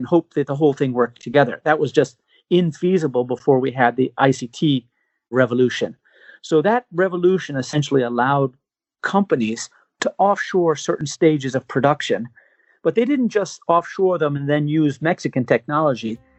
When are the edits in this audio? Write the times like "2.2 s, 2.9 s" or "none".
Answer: none